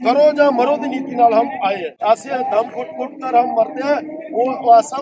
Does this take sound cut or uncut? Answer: cut